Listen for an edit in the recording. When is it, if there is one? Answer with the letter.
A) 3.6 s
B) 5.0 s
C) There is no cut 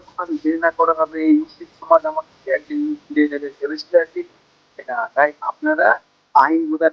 B